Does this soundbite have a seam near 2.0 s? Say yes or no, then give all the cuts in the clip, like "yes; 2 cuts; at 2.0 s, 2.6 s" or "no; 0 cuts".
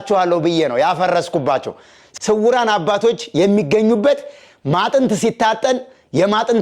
yes; 1 cut; at 2.0 s